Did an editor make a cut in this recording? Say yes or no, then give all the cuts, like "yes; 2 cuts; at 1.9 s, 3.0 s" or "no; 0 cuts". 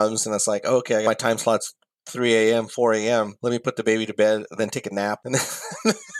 yes; 3 cuts; at 1.0 s, 3.3 s, 5.2 s